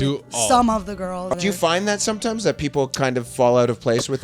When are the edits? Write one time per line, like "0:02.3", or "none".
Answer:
0:01.2

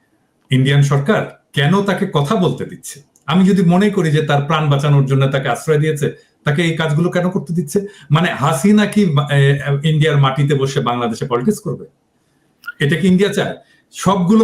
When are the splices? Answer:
none

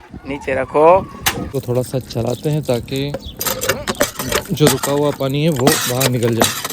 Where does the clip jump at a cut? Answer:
0:01.5

